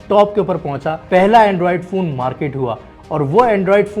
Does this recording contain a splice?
yes; 1 cut; at 1.0 s

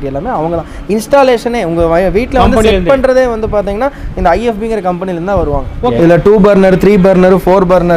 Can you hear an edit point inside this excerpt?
yes; 1 cut; at 5.9 s

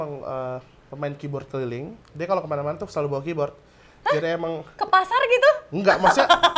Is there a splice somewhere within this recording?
yes; 1 cut; at 2.0 s

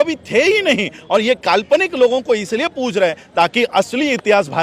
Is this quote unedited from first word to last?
yes; 0 cuts

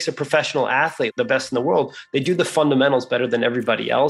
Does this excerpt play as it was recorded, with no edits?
no; 1 cut; at 1.1 s

